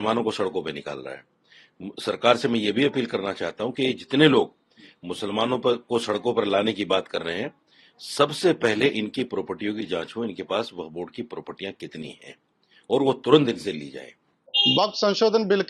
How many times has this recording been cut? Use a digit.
0